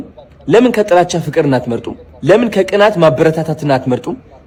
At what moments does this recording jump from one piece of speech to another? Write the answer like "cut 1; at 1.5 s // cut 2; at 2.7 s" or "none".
none